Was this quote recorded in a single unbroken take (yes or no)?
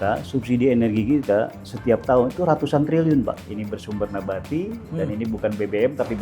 no